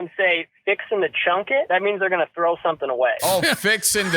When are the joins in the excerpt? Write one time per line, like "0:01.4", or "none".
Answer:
0:01.7
0:03.2